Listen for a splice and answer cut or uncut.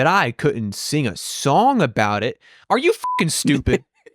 cut